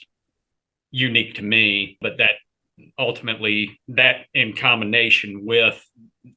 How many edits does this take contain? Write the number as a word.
one